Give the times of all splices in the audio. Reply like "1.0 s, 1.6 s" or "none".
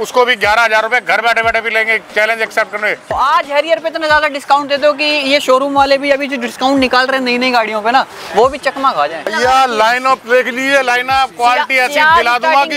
3.1 s, 9.3 s